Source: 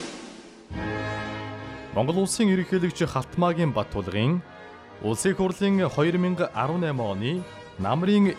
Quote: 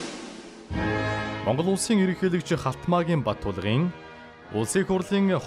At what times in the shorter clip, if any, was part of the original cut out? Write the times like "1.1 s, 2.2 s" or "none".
1.4 s